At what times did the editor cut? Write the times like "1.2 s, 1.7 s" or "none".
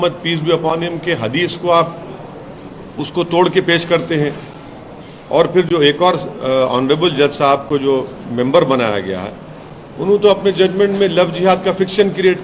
none